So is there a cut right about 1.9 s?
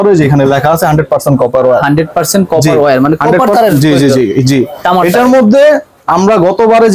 no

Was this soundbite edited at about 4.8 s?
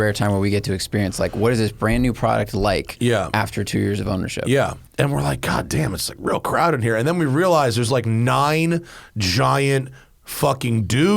yes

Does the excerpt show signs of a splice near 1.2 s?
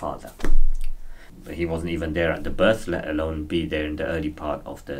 yes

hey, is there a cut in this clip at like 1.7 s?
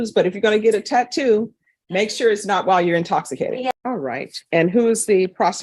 no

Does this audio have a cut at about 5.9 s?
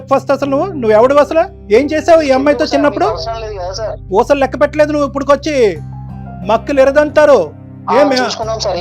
no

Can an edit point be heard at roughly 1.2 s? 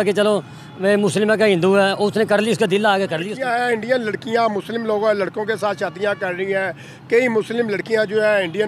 no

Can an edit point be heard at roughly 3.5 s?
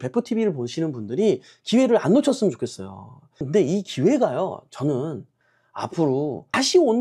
yes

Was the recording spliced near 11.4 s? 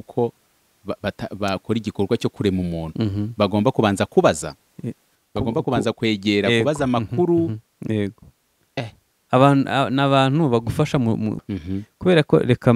yes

